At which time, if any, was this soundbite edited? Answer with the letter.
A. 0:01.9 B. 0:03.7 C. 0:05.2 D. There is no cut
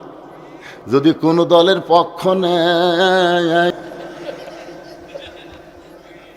B